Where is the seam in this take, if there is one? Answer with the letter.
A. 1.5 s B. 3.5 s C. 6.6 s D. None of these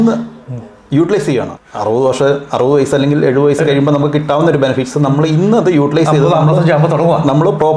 A